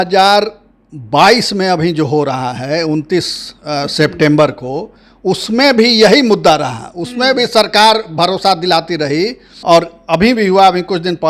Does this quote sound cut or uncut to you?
cut